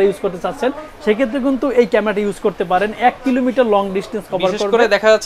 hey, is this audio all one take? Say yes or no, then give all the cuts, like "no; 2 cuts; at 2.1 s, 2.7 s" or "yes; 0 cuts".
yes; 0 cuts